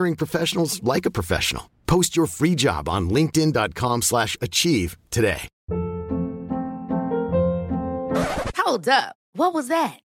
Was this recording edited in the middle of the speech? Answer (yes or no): yes